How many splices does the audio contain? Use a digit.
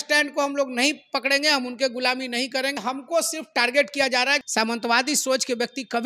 2